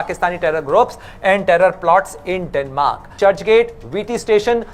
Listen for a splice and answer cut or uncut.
cut